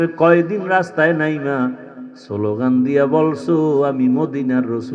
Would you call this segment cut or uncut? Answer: uncut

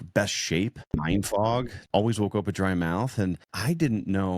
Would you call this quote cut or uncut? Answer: cut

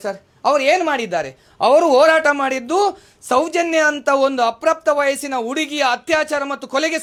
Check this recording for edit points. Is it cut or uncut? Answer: uncut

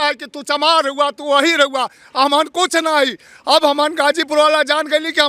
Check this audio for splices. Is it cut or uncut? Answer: uncut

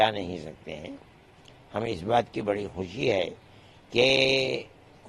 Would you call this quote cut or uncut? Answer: uncut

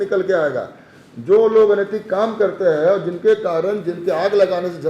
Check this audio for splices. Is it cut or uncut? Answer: uncut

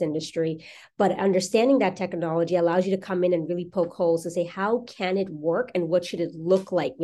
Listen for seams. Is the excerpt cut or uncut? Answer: uncut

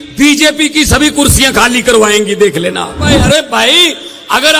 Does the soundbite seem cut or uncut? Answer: cut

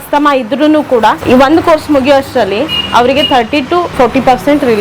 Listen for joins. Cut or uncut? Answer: cut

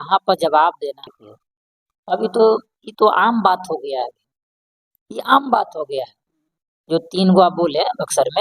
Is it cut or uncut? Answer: cut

